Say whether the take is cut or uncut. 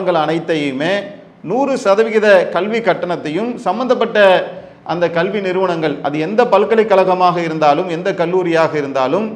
uncut